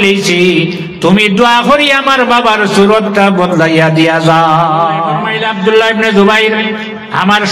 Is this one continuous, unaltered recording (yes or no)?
no